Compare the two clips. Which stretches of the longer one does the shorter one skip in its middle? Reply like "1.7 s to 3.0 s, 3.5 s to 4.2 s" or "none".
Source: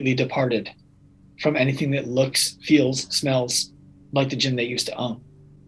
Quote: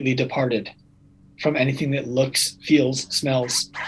none